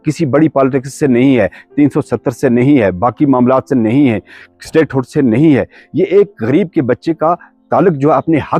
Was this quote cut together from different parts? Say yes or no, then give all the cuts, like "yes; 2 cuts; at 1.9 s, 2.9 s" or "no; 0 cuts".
no; 0 cuts